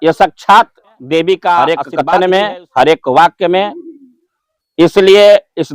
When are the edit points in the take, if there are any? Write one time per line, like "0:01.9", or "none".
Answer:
0:01.6